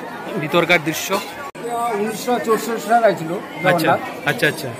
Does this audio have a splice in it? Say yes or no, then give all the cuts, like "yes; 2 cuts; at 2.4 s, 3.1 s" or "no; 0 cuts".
yes; 1 cut; at 1.6 s